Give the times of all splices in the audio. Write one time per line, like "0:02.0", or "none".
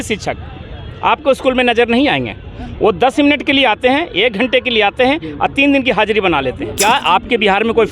0:06.8